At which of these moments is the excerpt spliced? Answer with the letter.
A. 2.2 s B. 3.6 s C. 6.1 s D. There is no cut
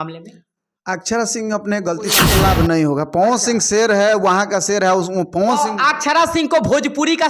A